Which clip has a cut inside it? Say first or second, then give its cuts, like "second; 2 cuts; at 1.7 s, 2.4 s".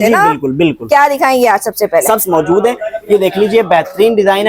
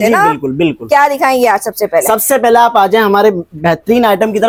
first; 1 cut; at 2.2 s